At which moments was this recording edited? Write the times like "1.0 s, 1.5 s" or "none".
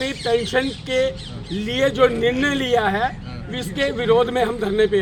none